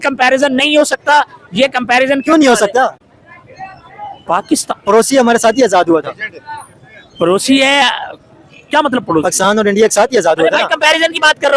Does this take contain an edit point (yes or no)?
no